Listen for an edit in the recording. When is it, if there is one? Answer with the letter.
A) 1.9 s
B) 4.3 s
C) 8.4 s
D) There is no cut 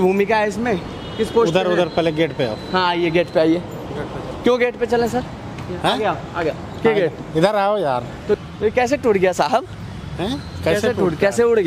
C